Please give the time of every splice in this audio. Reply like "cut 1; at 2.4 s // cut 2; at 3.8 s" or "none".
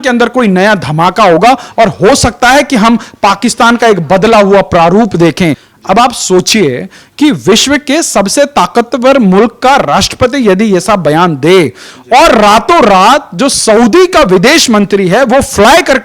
cut 1; at 5.7 s